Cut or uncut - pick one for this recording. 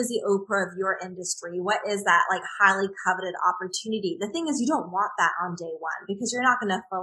uncut